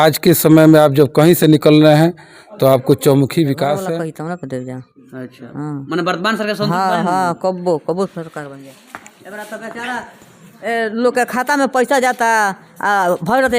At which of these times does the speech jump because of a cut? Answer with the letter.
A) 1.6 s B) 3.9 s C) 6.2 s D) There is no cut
B